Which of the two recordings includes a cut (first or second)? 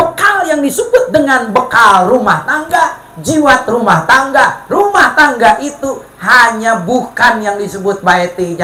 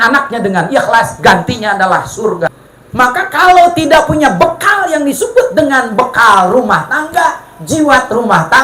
second